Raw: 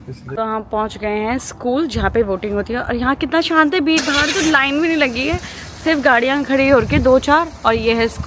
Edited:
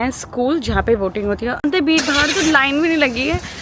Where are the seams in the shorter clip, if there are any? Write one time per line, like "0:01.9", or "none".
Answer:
0:01.6

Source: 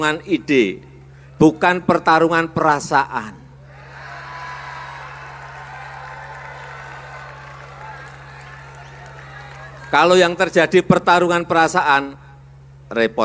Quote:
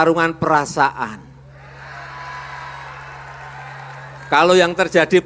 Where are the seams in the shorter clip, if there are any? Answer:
0:04.0

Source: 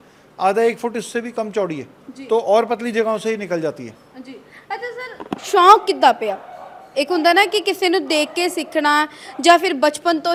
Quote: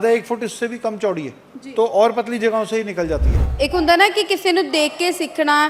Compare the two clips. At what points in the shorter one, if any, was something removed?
0:03.4

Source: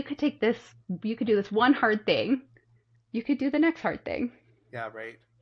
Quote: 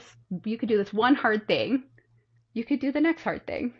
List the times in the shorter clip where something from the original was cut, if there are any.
none

